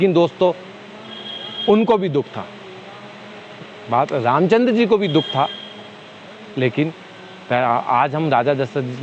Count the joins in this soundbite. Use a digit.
0